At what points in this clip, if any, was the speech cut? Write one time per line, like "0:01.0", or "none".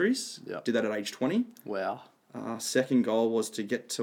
none